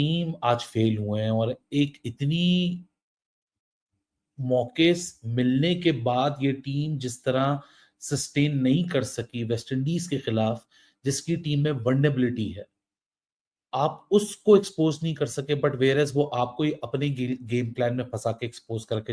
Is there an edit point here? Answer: no; 0 cuts

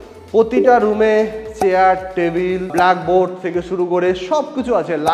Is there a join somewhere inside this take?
no; 0 cuts

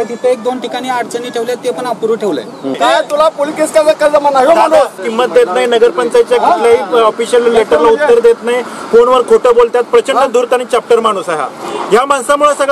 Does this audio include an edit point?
yes; 2 cuts; at 2.8 s, 5.1 s

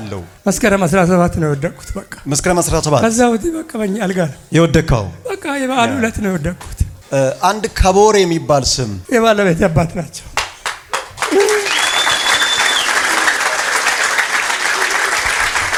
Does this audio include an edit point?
no; 0 cuts

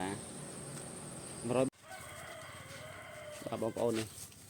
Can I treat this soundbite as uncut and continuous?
no; 1 cut; at 1.7 s

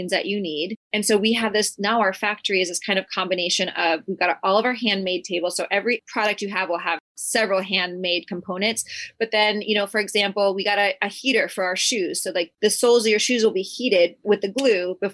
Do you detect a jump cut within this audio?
yes; 2 cuts; at 7.1 s, 12.5 s

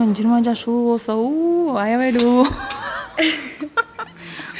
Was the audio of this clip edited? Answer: no; 0 cuts

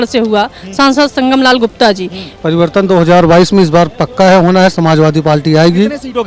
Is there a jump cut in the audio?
yes; 1 cut; at 2.3 s

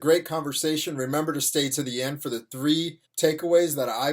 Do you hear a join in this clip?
yes; 1 cut; at 3.0 s

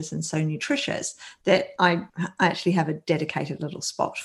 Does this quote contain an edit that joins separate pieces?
no; 0 cuts

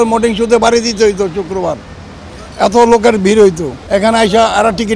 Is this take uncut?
no; 1 cut; at 3.7 s

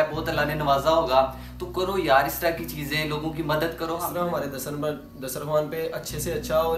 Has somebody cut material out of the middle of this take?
yes; 1 cut; at 4.0 s

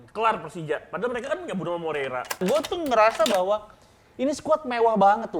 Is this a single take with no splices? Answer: no; 1 cut; at 2.4 s

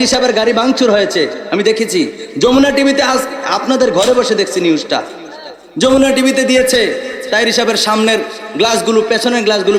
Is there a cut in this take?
no; 0 cuts

